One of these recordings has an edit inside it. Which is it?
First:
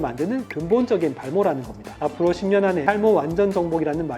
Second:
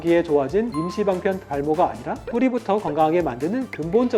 first; 1 cut; at 2.0 s

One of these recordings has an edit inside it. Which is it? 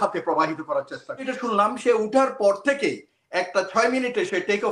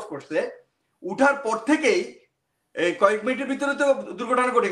first; 1 cut; at 1.3 s

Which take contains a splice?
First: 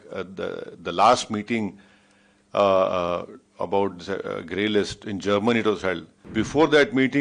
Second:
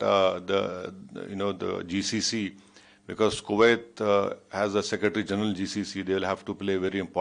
first; 1 cut; at 6.1 s

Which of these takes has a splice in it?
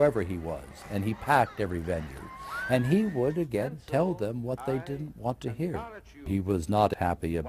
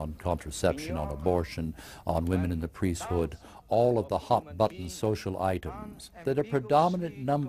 first; 1 cut; at 3.9 s

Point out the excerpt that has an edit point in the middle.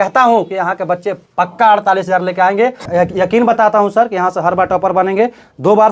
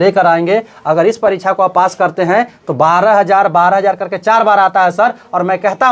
first; 1 cut; at 2.8 s

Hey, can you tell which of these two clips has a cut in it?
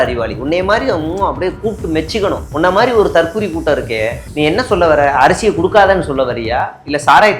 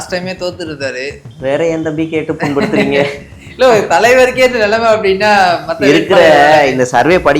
first; 1 cut; at 2.5 s

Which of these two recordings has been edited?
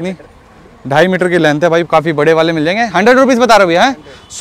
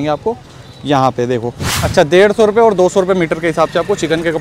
second; 1 cut; at 1.7 s

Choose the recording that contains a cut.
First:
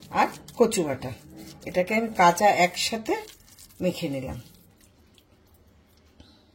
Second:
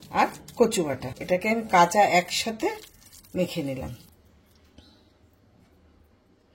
second; 2 cuts; at 1.1 s, 4.1 s

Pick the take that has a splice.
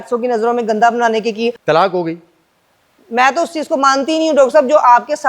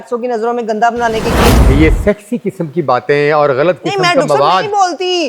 second; 1 cut; at 1.6 s

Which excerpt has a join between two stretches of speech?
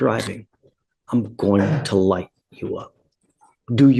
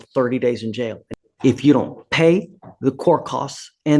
second; 1 cut; at 1.0 s

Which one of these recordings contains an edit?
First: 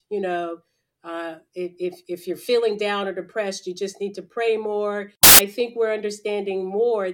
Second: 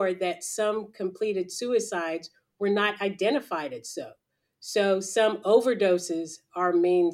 first; 1 cut; at 5.3 s

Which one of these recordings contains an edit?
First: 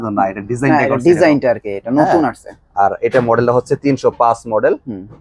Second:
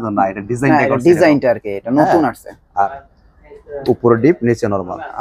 second; 1 cut; at 2.9 s

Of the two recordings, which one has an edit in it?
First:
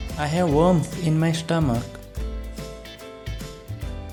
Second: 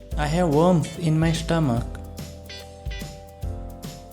second; 1 cut; at 2.0 s

